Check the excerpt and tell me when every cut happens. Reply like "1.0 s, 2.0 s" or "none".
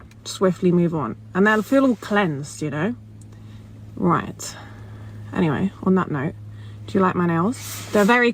5.4 s